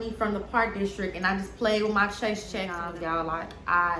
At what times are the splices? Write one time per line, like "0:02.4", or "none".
0:02.8

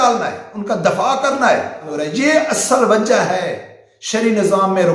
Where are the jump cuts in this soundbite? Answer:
0:01.8

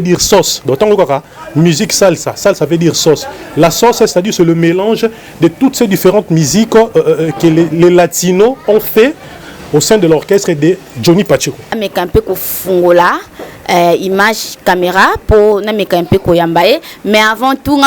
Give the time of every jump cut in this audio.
0:11.7

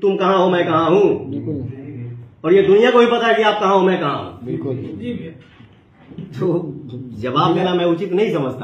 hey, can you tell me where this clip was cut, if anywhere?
none

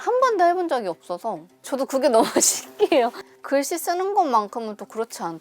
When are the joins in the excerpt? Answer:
0:03.3

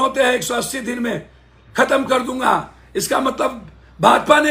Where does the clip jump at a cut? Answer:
none

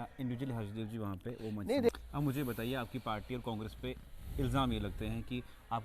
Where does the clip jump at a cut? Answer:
0:01.9

